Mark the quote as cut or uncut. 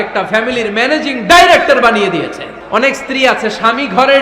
cut